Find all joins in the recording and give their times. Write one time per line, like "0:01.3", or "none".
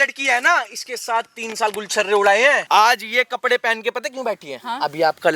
0:02.6

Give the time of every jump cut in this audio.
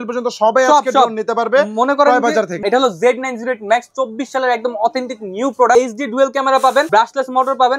0:02.6
0:05.7
0:06.9

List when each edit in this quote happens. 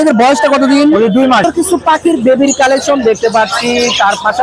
0:01.4

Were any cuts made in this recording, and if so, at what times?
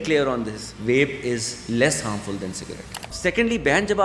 0:03.1

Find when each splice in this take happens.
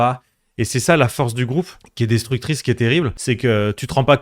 0:01.8
0:03.2

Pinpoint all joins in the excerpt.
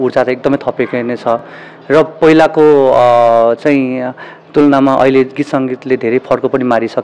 none

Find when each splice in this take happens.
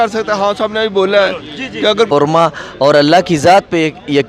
0:02.1

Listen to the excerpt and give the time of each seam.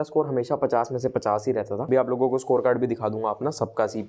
0:01.8

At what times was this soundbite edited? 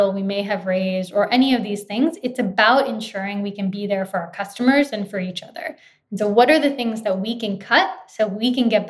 none

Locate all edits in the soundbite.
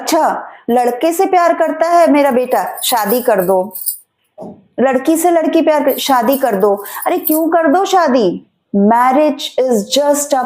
0:08.5

